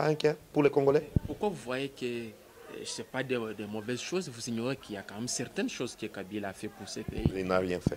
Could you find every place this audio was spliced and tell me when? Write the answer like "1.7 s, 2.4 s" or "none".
none